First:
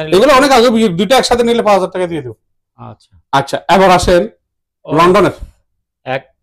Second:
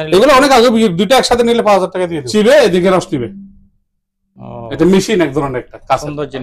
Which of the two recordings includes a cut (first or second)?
second